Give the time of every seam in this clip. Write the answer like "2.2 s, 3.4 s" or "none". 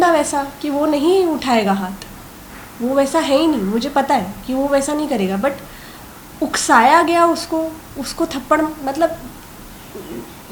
none